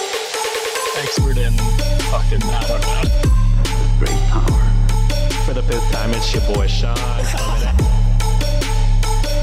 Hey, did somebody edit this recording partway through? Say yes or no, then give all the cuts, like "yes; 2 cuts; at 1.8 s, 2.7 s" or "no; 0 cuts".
no; 0 cuts